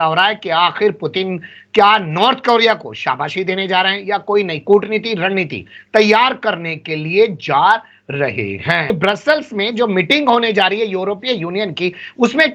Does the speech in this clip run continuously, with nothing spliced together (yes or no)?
no